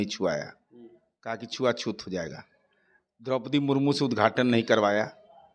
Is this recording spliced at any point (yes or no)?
no